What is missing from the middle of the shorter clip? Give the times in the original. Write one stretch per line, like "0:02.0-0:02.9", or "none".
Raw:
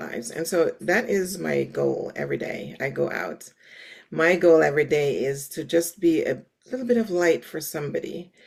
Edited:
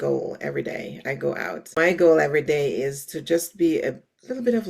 0:03.5-0:04.2